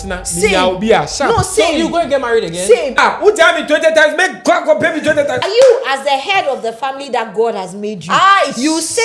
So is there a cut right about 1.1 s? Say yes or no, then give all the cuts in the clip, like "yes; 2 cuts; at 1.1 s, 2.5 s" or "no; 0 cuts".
no; 2 cuts; at 2.9 s, 5.4 s